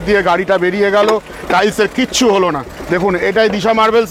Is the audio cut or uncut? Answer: uncut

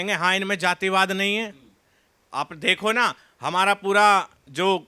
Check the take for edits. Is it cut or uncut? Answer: uncut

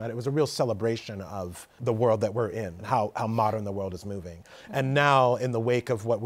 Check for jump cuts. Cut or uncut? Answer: cut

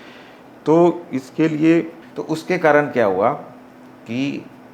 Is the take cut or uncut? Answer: cut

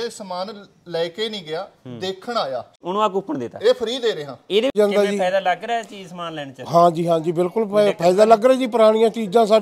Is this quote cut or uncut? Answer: cut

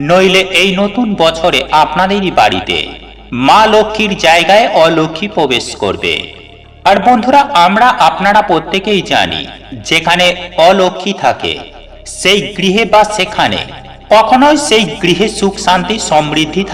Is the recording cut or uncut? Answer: uncut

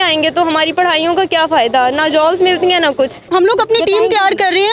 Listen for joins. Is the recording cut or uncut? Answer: cut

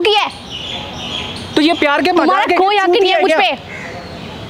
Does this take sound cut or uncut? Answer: uncut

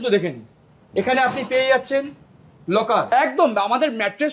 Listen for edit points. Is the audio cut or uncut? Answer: cut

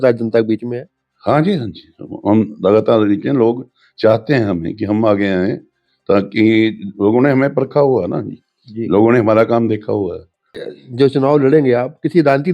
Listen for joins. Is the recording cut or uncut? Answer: cut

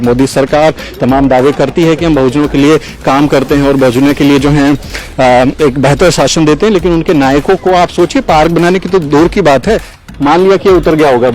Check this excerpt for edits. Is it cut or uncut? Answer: cut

